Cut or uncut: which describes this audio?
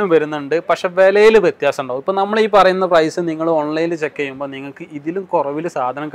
uncut